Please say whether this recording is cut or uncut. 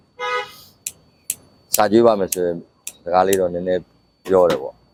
uncut